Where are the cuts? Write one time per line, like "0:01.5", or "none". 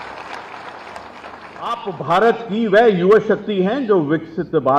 none